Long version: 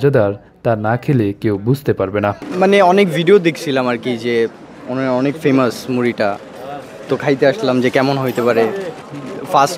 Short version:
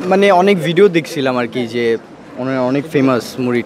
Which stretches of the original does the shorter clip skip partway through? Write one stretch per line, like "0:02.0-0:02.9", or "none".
none